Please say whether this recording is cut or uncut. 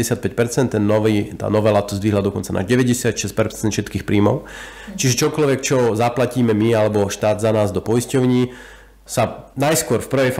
cut